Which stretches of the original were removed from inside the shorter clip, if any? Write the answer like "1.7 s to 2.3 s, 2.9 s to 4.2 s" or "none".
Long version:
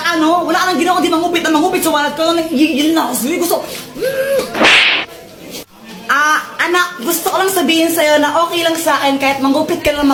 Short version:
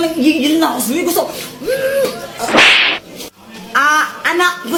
none